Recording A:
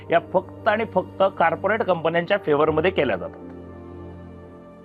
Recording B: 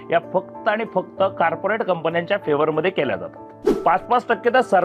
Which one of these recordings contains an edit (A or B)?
B